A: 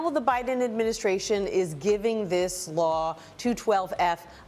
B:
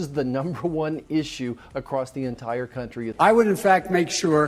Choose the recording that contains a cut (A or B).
B